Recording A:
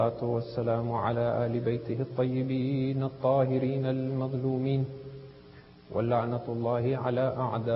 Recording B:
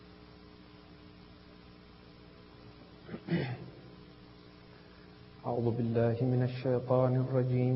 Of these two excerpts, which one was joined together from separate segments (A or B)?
A